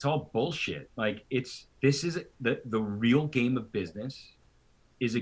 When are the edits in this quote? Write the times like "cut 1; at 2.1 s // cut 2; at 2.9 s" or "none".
cut 1; at 1.6 s